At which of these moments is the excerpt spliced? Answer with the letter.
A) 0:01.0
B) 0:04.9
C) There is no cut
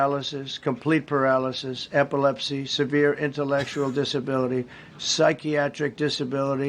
A